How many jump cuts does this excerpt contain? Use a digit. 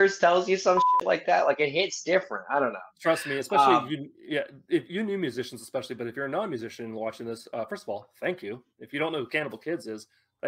0